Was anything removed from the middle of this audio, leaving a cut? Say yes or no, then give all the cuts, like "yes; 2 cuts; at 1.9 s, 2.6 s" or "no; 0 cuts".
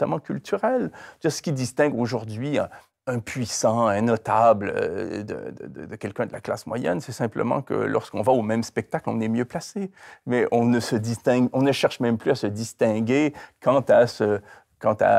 no; 0 cuts